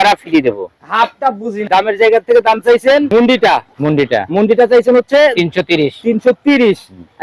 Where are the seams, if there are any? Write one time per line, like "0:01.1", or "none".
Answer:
0:01.6